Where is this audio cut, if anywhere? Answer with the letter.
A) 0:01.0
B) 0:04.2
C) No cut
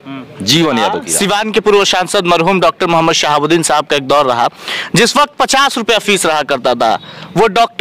A